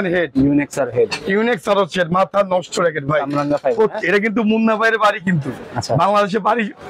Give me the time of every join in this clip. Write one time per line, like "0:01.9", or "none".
none